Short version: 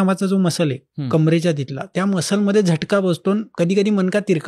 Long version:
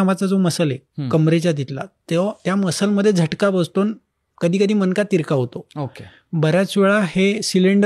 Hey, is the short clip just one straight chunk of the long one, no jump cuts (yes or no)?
no